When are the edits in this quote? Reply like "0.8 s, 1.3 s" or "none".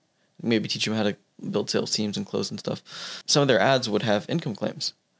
3.2 s

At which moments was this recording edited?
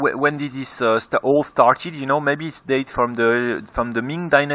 none

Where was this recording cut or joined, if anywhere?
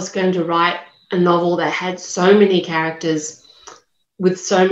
none

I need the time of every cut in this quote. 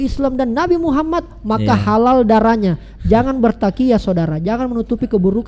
none

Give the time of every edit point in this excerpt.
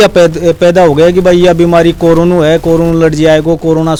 none

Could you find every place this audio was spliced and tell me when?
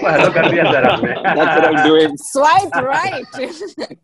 none

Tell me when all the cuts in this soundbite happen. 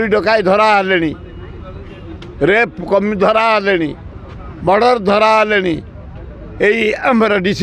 none

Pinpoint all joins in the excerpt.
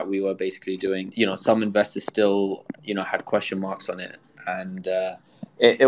1.1 s

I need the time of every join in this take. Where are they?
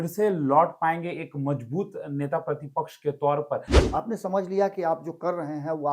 3.7 s

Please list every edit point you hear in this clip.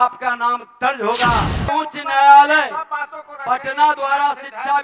1.7 s

